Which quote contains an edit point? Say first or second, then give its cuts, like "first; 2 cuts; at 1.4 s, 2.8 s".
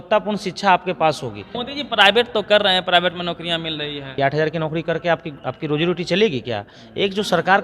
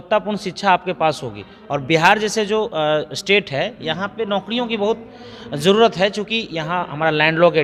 first; 2 cuts; at 1.6 s, 4.2 s